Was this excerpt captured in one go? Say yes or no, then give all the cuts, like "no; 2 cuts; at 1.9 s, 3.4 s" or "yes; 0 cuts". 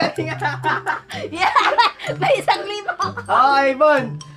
yes; 0 cuts